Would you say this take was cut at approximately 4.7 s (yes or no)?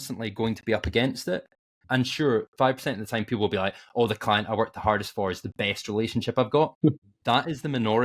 no